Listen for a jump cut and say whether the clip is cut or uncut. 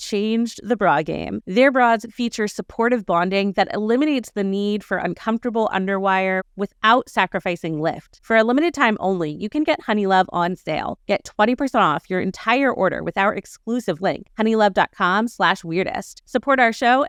uncut